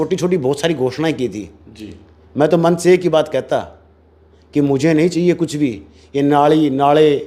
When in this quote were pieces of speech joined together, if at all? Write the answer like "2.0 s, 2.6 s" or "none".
none